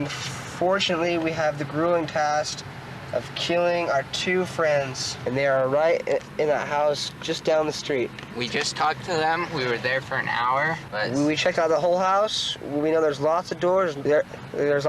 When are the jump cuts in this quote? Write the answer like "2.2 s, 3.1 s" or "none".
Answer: 5.0 s, 8.2 s, 10.8 s, 14.0 s